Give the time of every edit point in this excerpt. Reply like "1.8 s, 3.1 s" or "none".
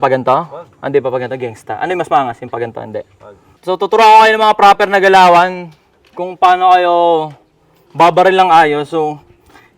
3.6 s